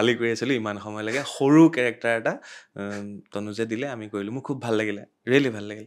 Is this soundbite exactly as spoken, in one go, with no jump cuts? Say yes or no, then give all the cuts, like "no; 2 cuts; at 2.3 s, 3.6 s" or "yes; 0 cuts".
yes; 0 cuts